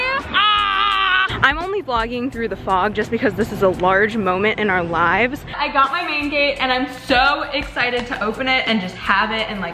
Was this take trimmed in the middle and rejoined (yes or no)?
yes